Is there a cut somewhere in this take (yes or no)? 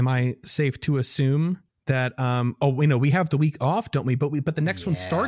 yes